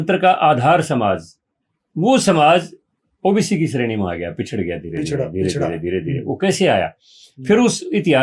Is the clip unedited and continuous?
yes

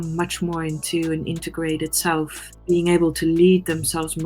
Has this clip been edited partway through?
yes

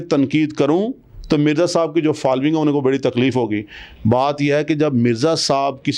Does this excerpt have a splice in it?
no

